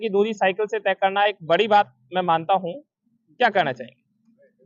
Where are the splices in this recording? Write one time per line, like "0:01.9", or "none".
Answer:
none